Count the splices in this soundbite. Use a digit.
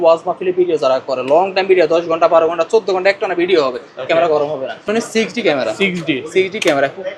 1